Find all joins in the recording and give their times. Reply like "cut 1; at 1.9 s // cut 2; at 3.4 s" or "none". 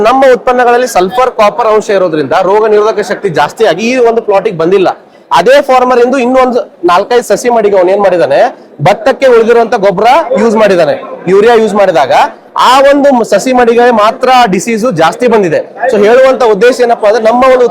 none